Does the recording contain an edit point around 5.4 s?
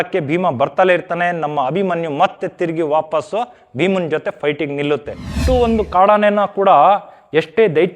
yes; 1 cut; at 5.4 s

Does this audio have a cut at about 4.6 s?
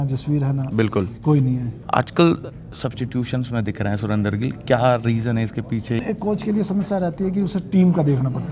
no; 2 cuts; at 1.7 s, 6.0 s

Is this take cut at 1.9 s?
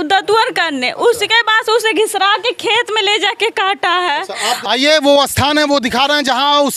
no; 1 cut; at 4.6 s

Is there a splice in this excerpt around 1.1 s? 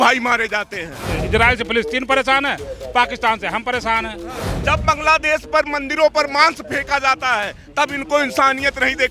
yes; 2 cuts; at 1.1 s, 4.5 s

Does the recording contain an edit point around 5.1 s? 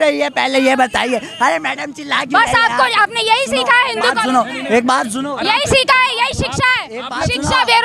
no; 0 cuts

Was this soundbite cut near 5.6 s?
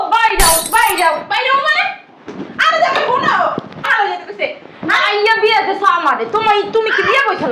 no; 1 cut; at 3.9 s

